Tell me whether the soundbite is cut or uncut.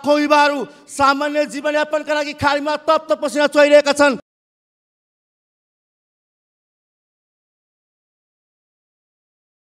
uncut